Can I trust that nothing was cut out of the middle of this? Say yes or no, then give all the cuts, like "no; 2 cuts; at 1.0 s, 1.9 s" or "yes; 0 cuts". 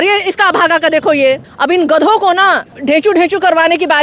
no; 2 cuts; at 1.5 s, 2.7 s